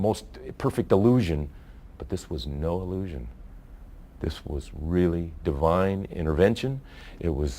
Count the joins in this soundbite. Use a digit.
1